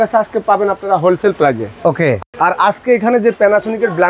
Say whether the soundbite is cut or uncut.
uncut